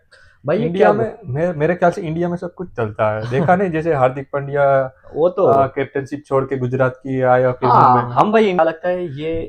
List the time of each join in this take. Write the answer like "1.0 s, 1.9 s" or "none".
8.6 s